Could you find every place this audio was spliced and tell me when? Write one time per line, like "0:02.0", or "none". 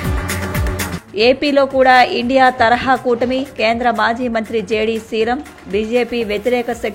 0:00.9